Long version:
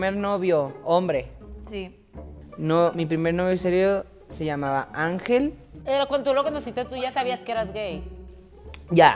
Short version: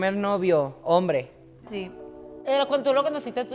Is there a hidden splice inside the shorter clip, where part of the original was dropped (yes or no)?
yes